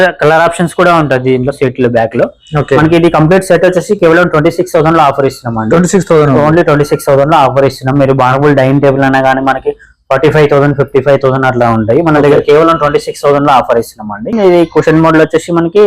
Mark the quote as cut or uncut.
cut